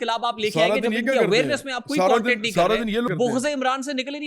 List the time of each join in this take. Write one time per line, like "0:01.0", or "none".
0:03.1